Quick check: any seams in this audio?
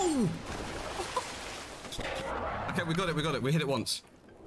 no; 0 cuts

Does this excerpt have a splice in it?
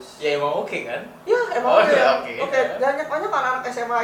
no; 0 cuts

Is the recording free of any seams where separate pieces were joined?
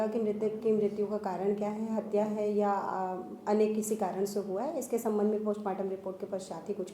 yes; 0 cuts

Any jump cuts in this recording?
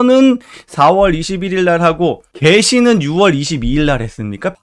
no; 0 cuts

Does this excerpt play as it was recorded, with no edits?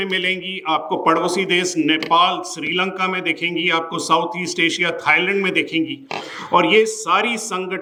yes; 0 cuts

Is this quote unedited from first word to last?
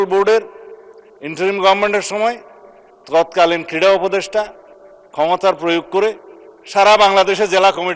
yes; 0 cuts

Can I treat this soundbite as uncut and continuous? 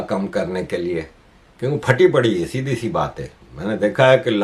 yes; 0 cuts

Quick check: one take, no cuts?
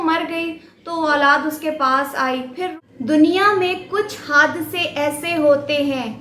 no; 1 cut; at 2.8 s

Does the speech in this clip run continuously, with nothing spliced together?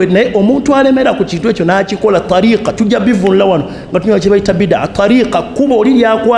yes; 0 cuts

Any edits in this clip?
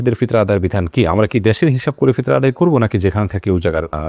no; 0 cuts

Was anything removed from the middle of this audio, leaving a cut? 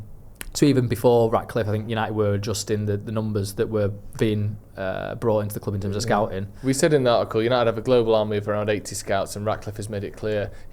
no; 0 cuts

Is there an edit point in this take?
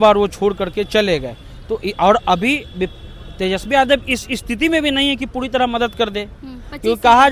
no; 0 cuts

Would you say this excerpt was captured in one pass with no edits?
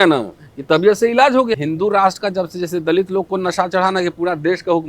no; 1 cut; at 1.6 s

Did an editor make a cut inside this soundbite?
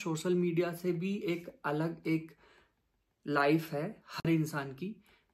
no; 0 cuts

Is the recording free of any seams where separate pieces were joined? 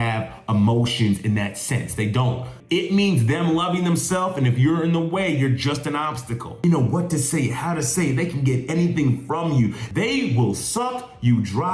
no; 3 cuts; at 2.5 s, 6.6 s, 9.8 s

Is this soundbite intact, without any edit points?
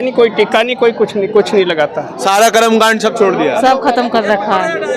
no; 1 cut; at 2.1 s

